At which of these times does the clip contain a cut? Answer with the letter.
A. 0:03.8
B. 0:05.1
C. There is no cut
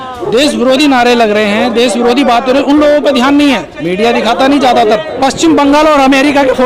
B